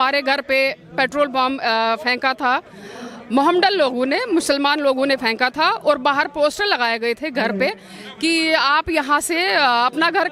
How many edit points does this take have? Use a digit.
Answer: 0